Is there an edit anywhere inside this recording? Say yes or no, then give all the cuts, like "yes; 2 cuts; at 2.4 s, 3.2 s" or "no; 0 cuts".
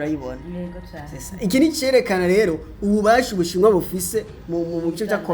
no; 0 cuts